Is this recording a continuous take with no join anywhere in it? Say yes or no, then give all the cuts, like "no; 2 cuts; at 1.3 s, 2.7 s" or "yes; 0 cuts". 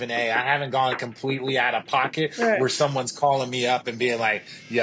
yes; 0 cuts